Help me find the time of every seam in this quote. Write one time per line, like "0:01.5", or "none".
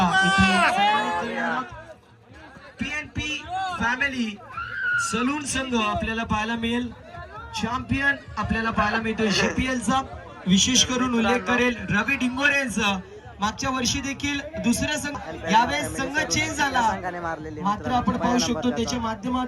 0:15.2